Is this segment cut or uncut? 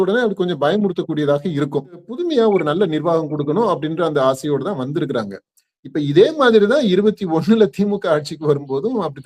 cut